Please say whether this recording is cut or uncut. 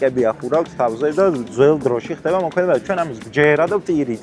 uncut